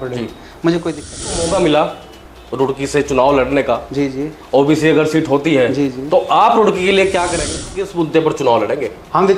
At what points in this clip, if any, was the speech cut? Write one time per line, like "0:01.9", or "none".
0:01.4
0:07.8